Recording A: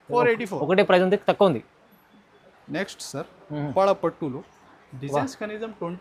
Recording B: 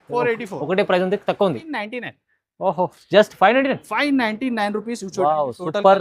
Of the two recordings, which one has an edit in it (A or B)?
B